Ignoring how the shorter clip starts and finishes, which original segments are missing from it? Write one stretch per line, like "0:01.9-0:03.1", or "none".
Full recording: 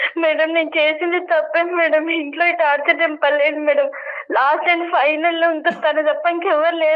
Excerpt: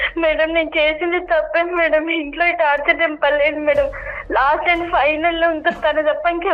none